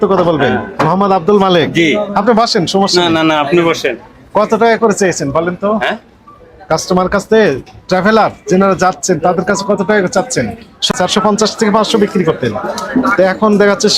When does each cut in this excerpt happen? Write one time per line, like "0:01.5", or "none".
0:10.9